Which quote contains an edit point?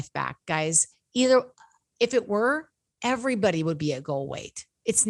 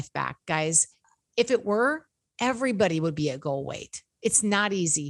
second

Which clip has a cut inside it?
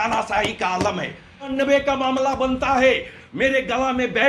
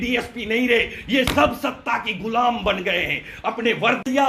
first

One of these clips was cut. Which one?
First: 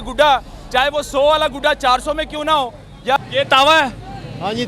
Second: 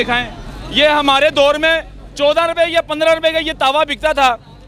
first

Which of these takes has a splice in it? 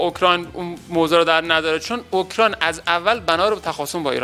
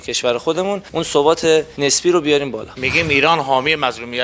second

